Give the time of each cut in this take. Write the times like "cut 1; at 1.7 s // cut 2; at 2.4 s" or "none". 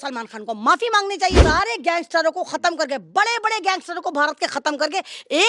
cut 1; at 1.4 s